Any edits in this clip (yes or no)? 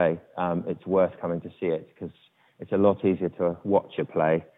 no